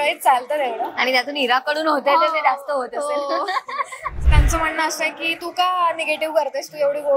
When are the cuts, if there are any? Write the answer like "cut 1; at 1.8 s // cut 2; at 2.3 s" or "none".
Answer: cut 1; at 4.2 s

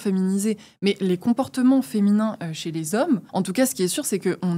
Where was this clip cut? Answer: cut 1; at 3.3 s

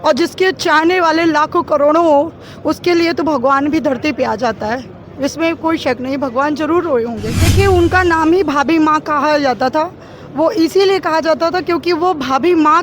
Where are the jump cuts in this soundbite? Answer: cut 1; at 7.4 s

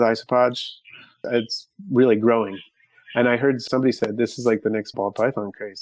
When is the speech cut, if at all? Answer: cut 1; at 1.2 s // cut 2; at 3.6 s // cut 3; at 4.9 s

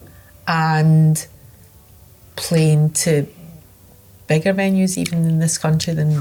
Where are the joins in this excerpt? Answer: none

